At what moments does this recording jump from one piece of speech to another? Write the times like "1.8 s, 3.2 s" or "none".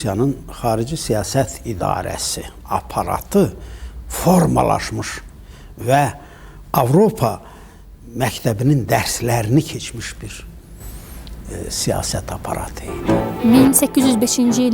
12.9 s